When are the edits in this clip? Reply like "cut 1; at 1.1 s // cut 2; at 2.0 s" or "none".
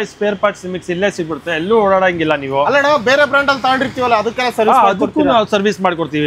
none